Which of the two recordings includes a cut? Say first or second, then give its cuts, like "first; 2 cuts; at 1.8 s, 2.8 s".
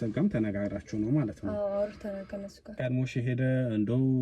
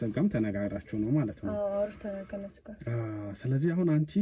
first; 1 cut; at 2.8 s